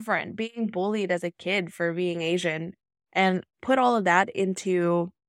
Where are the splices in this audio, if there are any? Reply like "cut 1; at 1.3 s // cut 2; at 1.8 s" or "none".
none